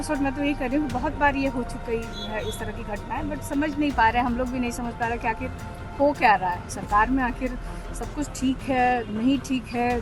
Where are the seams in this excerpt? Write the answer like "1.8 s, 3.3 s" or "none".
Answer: none